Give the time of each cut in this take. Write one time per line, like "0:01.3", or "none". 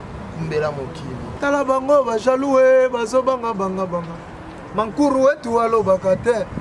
none